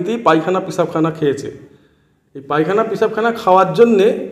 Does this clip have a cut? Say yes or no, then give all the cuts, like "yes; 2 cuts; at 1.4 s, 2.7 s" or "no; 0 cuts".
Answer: no; 0 cuts